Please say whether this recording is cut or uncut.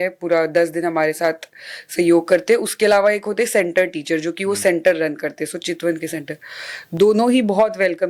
uncut